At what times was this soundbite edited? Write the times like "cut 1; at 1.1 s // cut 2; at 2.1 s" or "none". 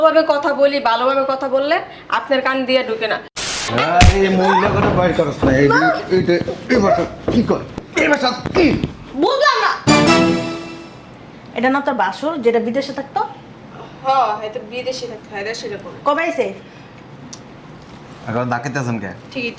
cut 1; at 3.5 s